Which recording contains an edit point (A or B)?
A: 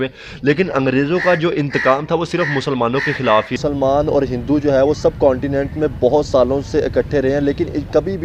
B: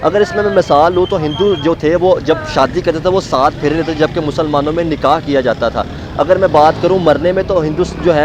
A